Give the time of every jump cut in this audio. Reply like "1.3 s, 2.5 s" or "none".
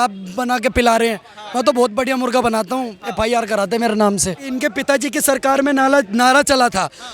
4.4 s